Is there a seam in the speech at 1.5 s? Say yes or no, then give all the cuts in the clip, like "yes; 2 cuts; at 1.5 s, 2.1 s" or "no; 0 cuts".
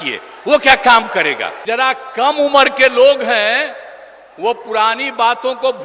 yes; 1 cut; at 1.5 s